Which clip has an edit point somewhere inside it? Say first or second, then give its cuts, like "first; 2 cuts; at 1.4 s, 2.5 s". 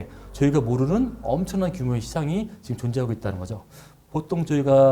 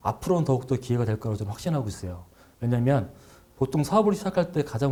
first; 1 cut; at 4.0 s